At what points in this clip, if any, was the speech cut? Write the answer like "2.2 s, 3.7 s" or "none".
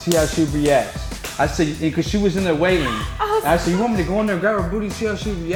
none